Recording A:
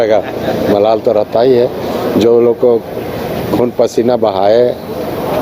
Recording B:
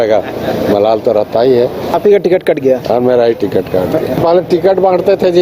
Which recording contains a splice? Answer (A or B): B